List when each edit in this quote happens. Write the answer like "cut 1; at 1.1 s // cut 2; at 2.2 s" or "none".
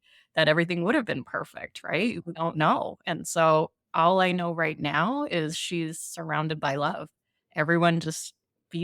cut 1; at 2.3 s // cut 2; at 7.4 s